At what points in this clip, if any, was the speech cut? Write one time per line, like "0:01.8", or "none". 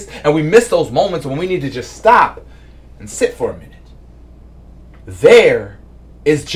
none